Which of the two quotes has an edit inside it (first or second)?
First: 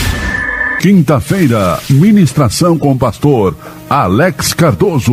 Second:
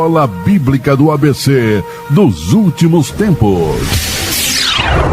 second